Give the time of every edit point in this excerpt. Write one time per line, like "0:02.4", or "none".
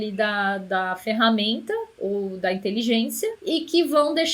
0:03.4